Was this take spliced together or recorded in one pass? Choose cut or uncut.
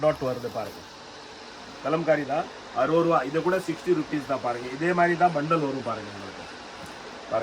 uncut